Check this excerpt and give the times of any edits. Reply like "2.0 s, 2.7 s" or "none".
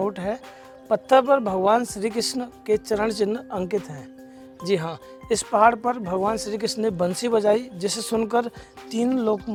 none